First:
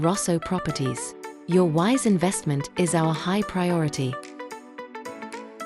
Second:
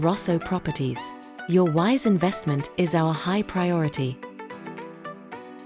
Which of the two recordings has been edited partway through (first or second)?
first